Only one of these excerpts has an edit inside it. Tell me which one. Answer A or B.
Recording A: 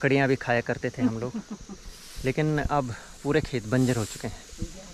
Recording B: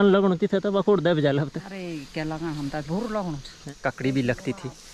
B